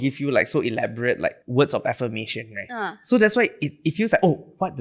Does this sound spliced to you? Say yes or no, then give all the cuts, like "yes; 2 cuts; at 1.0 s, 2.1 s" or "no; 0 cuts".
yes; 1 cut; at 1.4 s